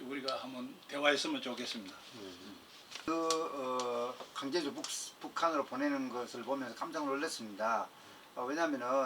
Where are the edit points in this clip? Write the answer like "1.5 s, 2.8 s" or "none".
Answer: 3.1 s